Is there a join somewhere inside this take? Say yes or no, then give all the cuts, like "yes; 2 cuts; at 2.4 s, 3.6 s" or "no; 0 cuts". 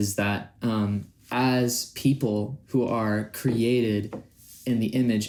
no; 0 cuts